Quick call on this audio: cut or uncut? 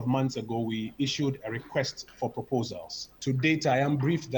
uncut